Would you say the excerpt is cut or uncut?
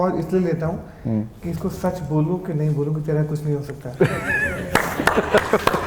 uncut